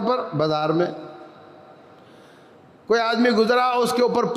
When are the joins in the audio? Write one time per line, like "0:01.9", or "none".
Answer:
none